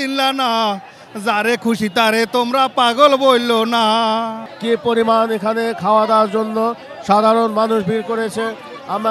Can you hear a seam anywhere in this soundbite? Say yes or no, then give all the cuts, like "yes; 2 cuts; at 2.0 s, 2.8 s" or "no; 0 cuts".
yes; 1 cut; at 4.5 s